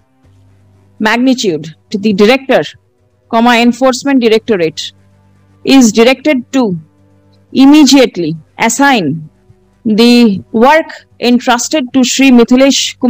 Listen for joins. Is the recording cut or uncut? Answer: cut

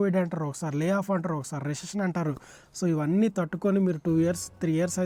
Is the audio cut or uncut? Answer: uncut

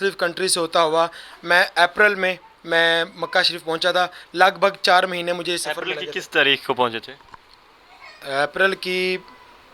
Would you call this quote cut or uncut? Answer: uncut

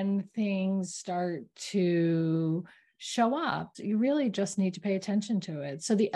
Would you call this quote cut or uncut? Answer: cut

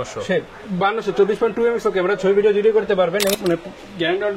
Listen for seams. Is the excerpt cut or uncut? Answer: cut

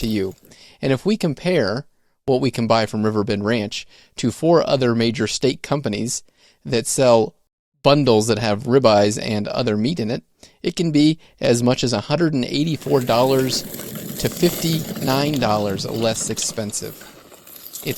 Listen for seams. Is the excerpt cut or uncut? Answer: uncut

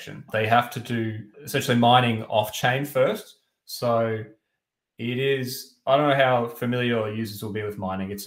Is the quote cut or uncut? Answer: uncut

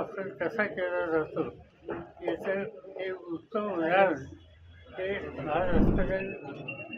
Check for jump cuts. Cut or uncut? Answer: cut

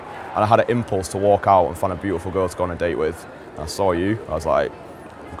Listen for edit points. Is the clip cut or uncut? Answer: uncut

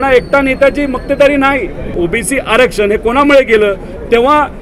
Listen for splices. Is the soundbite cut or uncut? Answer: cut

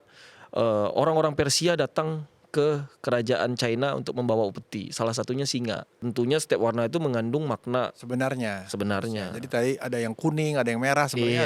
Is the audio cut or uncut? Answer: cut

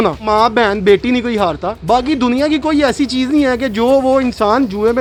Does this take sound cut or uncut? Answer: uncut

